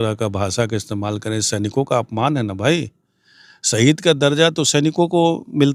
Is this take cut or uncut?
uncut